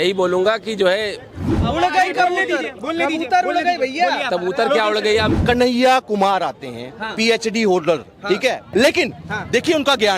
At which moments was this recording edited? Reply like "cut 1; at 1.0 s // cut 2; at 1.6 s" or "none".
cut 1; at 1.5 s // cut 2; at 5.3 s // cut 3; at 8.7 s